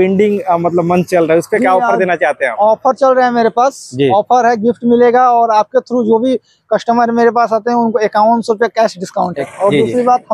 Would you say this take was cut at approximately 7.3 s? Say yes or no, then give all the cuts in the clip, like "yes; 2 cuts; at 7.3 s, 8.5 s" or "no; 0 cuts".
no; 1 cut; at 9.4 s